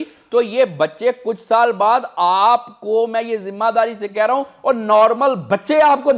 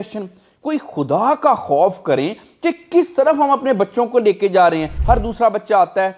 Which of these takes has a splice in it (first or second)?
second